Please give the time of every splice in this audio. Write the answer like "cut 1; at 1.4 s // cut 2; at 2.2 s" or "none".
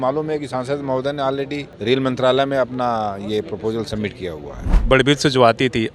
cut 1; at 1.7 s // cut 2; at 4.8 s